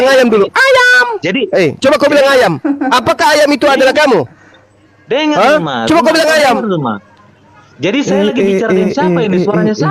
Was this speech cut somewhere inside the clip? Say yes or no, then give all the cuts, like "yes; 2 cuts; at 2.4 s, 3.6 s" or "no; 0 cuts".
no; 0 cuts